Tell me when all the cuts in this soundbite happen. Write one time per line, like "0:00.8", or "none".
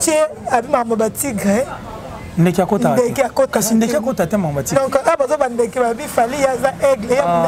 none